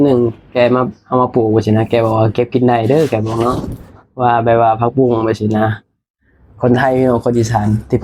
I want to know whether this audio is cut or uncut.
uncut